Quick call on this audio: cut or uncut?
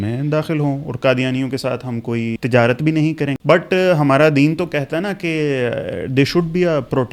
cut